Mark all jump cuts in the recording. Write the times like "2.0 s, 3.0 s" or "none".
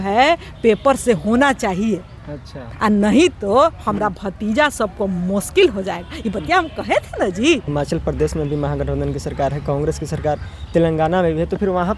7.7 s

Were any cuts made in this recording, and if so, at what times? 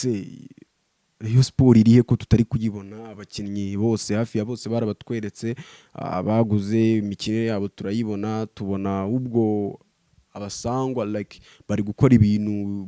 none

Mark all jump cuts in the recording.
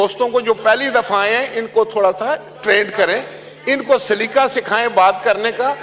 none

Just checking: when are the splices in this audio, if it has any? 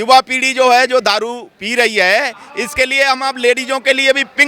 none

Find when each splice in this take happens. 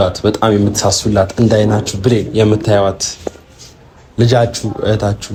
none

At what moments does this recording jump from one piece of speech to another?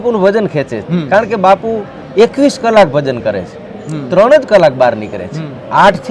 none

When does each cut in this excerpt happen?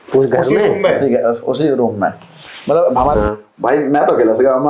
3.1 s

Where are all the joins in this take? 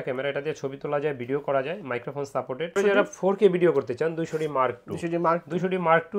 2.8 s

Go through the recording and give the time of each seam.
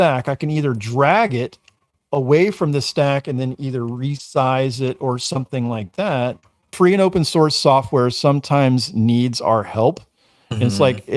6.7 s

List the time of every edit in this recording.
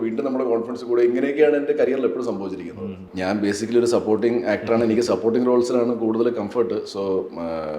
3.1 s

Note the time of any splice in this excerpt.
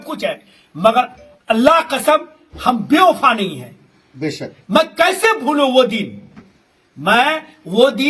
none

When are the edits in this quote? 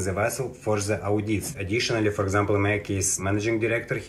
1.6 s, 3.2 s

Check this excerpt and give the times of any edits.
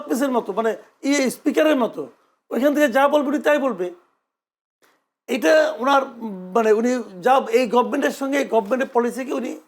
none

